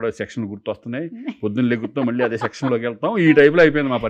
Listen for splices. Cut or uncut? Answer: uncut